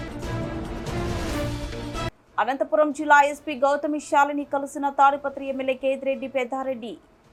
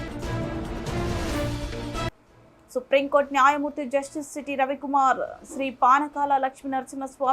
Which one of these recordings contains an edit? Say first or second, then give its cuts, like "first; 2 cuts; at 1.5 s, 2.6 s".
second; 1 cut; at 2.2 s